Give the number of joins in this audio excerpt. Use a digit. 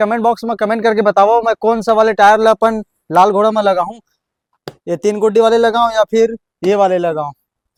0